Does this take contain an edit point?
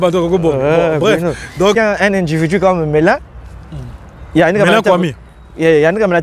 yes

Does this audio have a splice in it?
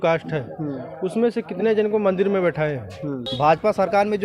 yes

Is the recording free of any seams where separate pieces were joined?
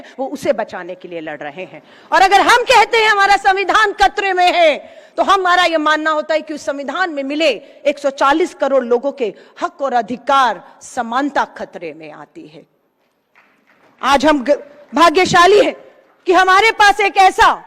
yes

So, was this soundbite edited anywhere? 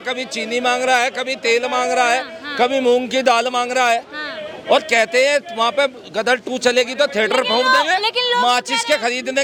no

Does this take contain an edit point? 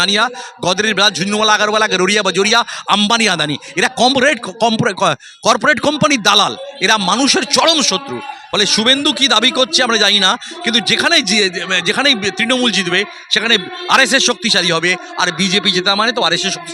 no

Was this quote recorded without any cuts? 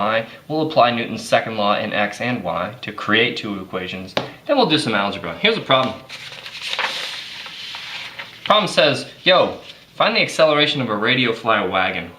no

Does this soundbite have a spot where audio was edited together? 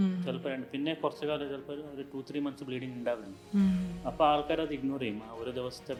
no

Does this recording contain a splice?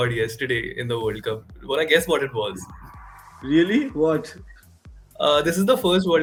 no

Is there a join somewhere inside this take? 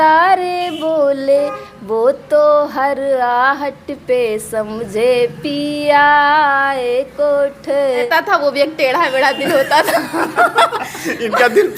yes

